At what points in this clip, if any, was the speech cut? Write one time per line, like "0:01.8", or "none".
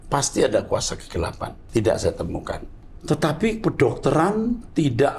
0:01.5
0:02.7